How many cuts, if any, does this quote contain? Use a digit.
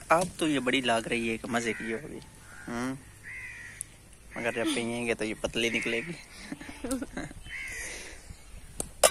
0